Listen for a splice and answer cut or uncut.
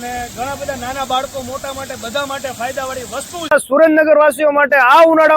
cut